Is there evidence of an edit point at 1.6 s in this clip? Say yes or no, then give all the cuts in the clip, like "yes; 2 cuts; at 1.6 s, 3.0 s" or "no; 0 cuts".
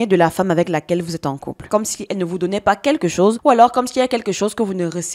yes; 1 cut; at 1.6 s